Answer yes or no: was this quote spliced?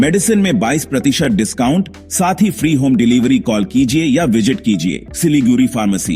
yes